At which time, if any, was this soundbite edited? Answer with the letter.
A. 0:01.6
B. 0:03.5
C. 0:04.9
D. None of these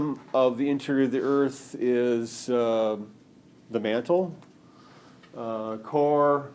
A